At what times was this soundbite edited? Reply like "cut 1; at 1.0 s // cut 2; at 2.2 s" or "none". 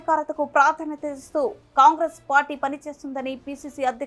none